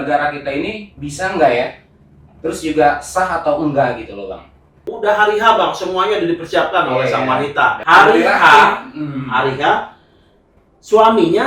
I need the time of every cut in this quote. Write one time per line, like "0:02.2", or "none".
0:04.8
0:07.8